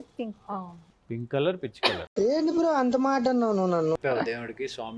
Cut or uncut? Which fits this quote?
cut